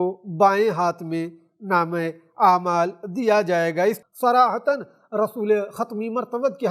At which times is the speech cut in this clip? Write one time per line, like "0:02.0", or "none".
0:04.0